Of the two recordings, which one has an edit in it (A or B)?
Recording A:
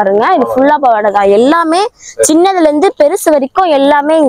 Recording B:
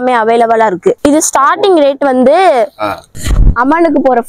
B